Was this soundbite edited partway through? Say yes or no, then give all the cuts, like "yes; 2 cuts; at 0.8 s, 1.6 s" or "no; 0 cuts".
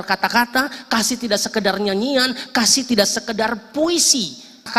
no; 0 cuts